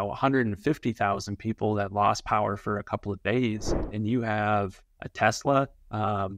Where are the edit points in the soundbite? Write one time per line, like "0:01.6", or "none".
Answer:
0:03.9